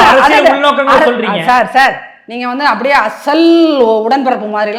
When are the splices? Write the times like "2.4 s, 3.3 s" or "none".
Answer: none